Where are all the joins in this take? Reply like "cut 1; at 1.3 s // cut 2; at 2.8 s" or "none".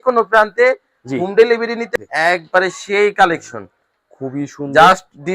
cut 1; at 1.9 s